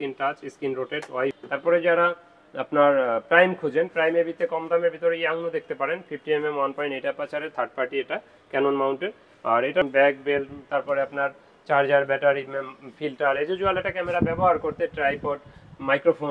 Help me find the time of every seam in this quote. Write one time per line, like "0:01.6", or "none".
0:01.4
0:09.9